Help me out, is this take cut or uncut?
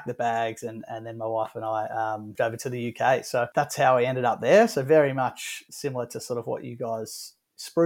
cut